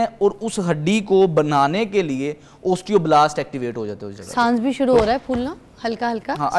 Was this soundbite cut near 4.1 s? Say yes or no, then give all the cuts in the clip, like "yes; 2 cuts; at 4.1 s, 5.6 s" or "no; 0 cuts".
no; 0 cuts